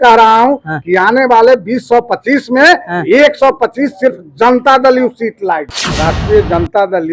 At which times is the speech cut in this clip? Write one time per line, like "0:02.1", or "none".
0:05.8

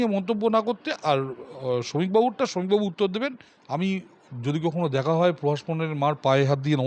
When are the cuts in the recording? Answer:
0:03.5

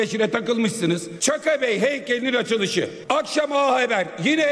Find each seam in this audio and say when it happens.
0:01.1
0:03.0

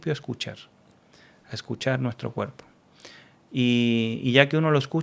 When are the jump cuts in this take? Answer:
none

